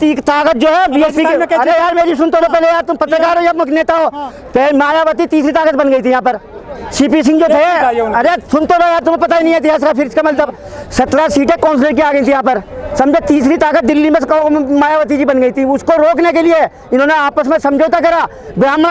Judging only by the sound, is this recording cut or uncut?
uncut